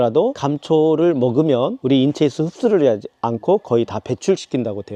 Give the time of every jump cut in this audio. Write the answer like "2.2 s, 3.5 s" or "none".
none